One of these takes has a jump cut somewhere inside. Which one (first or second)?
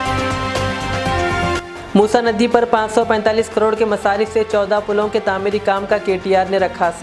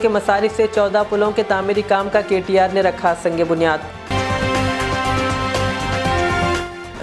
first